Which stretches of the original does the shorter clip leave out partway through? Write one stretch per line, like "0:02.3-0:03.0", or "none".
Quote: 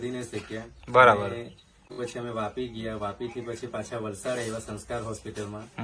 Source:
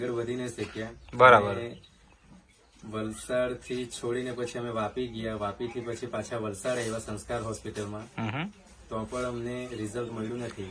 0:02.2-0:04.4